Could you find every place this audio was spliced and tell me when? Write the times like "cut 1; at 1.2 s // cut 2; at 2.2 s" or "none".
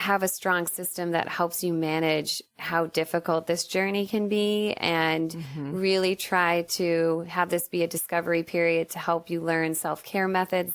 none